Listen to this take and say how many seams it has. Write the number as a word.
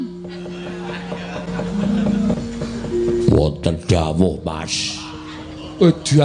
one